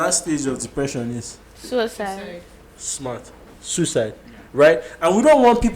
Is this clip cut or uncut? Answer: uncut